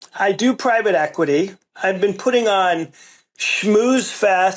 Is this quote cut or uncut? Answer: cut